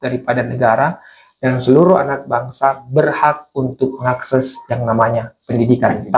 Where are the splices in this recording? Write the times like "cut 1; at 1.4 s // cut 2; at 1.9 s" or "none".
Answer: none